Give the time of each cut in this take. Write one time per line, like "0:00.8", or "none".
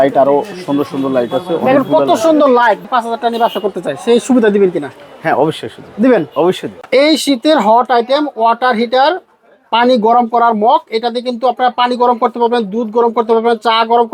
0:02.8
0:06.7